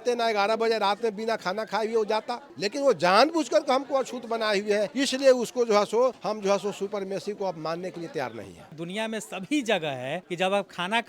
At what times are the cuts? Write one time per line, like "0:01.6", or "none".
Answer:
0:02.4
0:04.9
0:06.2
0:08.8
0:10.2